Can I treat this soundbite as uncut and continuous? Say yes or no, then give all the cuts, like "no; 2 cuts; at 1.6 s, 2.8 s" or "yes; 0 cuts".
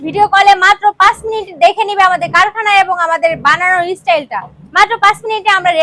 yes; 0 cuts